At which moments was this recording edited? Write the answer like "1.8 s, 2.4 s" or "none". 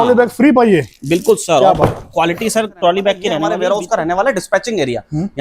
3.5 s